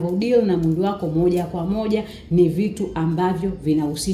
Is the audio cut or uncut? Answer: uncut